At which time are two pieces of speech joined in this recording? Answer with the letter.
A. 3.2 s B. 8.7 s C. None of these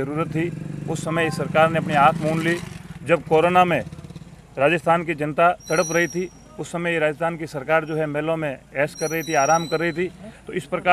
C